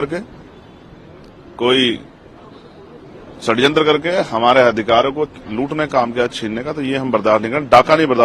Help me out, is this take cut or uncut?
uncut